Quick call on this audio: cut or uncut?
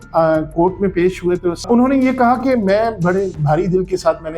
cut